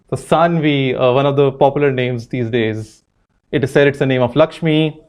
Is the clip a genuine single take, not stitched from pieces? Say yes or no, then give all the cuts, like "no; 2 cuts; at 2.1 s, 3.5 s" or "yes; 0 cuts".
yes; 0 cuts